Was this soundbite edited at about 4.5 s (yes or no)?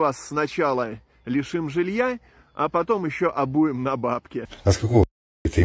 yes